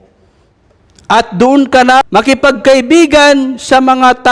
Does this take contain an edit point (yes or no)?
yes